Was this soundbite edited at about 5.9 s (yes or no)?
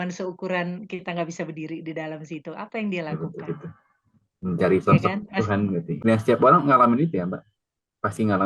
yes